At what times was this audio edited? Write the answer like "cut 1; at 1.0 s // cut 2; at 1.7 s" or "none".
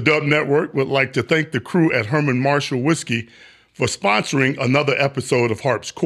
none